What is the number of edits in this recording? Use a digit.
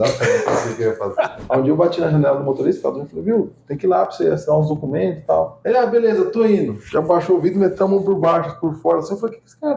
2